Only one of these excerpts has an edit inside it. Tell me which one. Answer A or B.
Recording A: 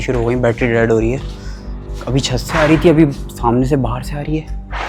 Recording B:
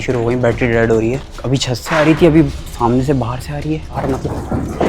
B